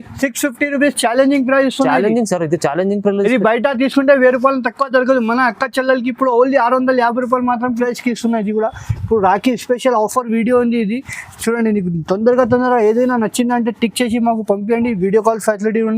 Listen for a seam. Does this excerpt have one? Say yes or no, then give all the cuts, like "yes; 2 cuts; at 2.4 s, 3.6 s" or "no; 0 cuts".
yes; 1 cut; at 7.8 s